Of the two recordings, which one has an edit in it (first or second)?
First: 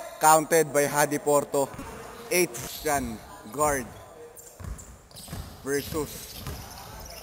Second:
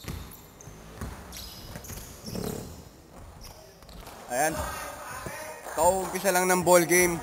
first